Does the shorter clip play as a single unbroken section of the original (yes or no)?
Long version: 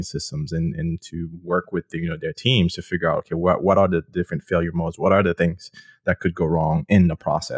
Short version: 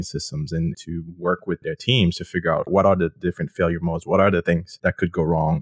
no